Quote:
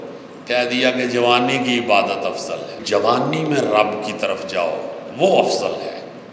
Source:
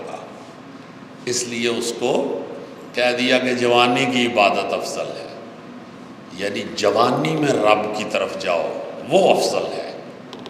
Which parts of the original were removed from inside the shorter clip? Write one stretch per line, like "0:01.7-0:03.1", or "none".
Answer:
0:05.2-0:06.7